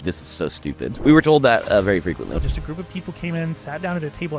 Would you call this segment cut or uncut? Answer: cut